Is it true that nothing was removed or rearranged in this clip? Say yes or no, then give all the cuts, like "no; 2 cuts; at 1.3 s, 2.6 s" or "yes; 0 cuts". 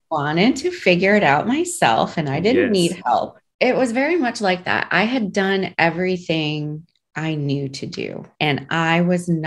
no; 2 cuts; at 3.4 s, 8.2 s